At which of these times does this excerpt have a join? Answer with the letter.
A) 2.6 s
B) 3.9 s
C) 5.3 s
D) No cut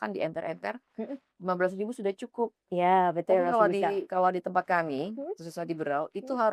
D